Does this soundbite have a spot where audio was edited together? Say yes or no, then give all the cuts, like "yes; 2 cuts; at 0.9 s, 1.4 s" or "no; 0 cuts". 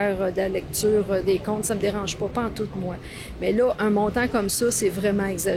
no; 0 cuts